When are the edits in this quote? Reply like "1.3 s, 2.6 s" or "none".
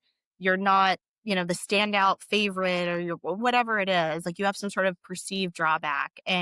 none